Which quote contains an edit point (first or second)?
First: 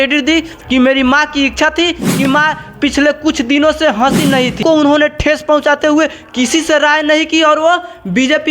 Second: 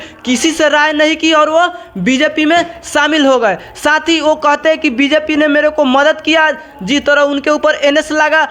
first